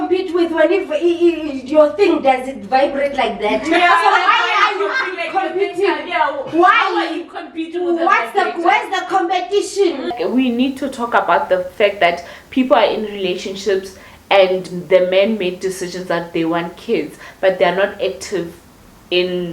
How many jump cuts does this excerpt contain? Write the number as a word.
one